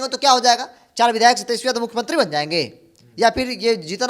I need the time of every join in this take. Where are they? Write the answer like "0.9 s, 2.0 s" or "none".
none